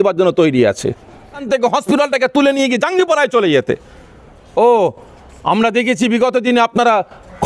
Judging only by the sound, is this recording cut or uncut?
cut